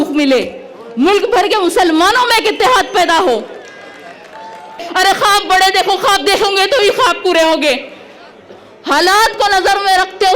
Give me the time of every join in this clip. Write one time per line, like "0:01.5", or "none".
0:04.9